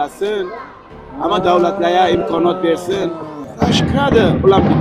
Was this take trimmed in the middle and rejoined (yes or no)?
yes